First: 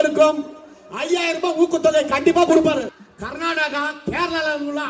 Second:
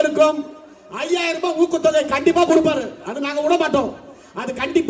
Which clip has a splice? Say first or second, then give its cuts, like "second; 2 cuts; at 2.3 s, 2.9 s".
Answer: first; 1 cut; at 3.0 s